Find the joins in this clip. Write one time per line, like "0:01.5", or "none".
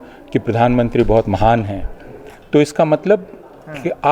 none

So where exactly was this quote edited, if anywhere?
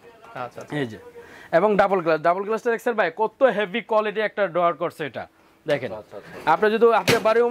none

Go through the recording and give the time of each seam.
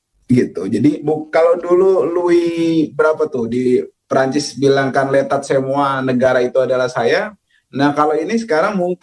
0:01.0

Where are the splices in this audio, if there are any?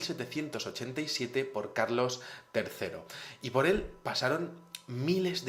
none

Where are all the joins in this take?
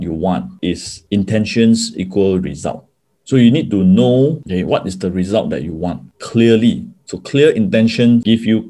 none

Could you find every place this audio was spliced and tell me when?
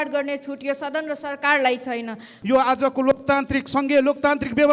0:02.4

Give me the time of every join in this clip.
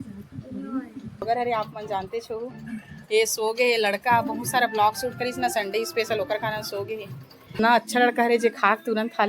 0:01.2
0:07.6

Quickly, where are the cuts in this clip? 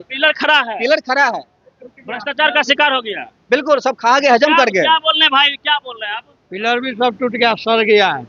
none

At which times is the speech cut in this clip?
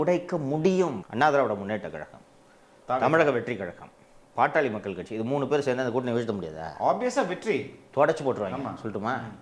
0:01.0

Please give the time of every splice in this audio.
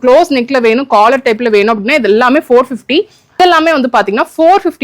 0:03.4

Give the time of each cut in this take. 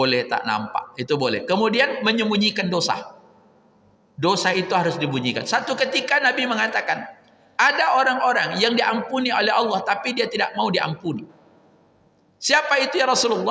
none

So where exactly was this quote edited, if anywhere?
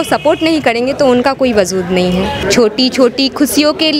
0:02.4

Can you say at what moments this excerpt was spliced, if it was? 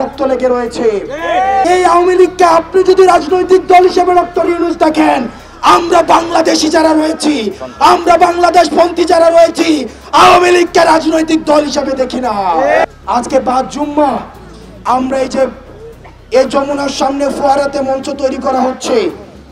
0:01.6
0:12.8

